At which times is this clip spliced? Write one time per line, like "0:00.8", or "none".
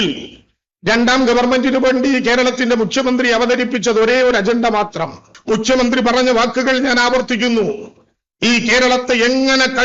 0:05.3